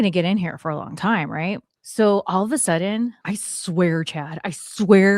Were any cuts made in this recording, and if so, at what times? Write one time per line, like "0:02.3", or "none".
0:01.7
0:03.2